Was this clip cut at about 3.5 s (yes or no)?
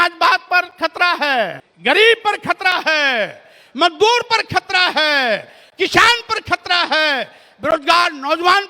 no